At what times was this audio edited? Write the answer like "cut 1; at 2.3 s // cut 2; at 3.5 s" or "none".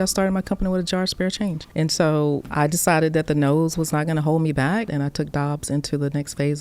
cut 1; at 1.6 s // cut 2; at 2.5 s // cut 3; at 4.9 s